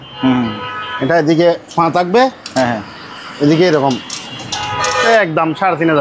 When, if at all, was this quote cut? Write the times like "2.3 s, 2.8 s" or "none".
5.1 s